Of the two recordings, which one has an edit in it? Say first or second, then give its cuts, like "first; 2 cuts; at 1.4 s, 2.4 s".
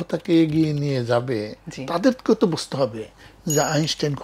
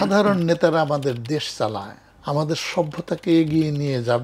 second; 1 cut; at 2.0 s